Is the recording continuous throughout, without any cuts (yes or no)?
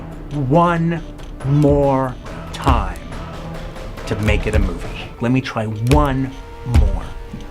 no